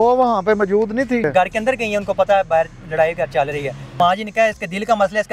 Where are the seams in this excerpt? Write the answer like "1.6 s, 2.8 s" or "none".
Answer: 1.3 s, 4.0 s